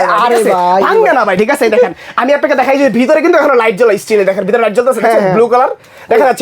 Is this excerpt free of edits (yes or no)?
yes